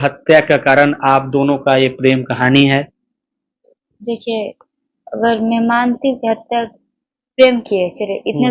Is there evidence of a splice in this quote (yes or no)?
no